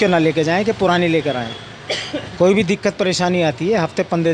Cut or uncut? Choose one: uncut